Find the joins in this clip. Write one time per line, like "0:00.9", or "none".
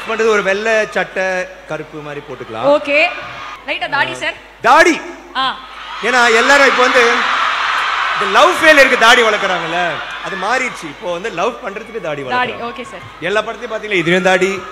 none

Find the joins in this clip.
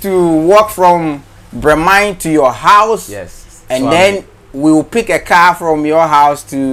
none

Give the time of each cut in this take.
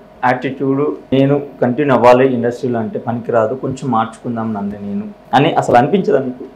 0:01.1
0:05.2

